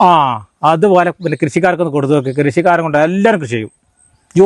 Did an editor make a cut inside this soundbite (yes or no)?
no